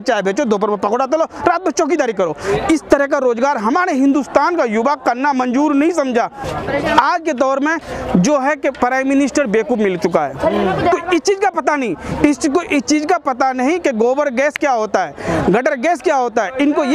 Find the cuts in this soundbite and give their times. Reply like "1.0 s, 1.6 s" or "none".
6.4 s, 10.9 s